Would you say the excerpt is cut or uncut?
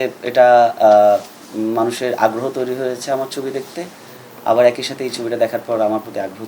uncut